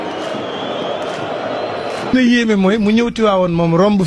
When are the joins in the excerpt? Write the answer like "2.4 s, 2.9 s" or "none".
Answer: 2.1 s